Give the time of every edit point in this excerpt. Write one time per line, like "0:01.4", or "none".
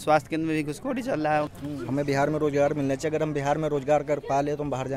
0:01.5